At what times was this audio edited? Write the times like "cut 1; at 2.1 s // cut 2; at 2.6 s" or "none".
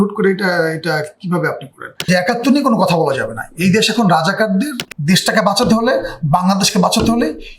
cut 1; at 2.1 s // cut 2; at 4.8 s